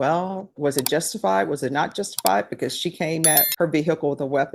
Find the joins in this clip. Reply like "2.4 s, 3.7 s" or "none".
3.5 s